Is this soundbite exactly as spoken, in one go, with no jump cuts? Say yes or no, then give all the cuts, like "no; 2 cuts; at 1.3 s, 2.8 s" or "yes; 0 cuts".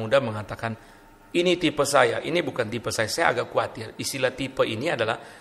yes; 0 cuts